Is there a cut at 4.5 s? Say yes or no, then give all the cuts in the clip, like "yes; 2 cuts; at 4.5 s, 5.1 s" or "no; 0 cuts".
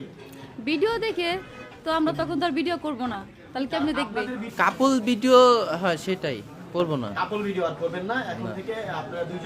yes; 1 cut; at 4.5 s